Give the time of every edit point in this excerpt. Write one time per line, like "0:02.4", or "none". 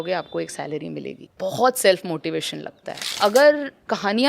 0:01.2
0:03.1